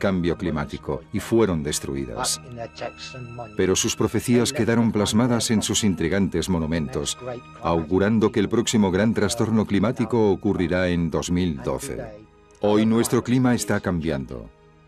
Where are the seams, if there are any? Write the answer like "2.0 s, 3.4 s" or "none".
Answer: 1.8 s